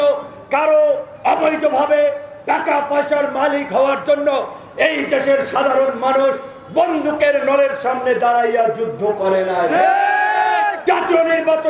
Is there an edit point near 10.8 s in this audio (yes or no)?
yes